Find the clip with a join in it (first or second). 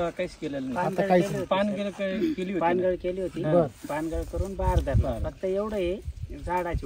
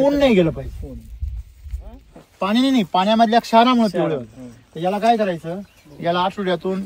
second